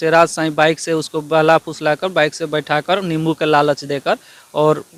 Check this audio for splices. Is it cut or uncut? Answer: uncut